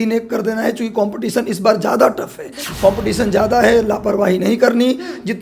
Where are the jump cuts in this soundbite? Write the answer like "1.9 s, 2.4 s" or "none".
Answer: 2.6 s